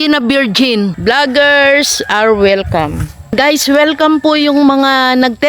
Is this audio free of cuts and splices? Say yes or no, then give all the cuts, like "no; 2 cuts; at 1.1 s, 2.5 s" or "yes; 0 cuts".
no; 2 cuts; at 1.0 s, 3.3 s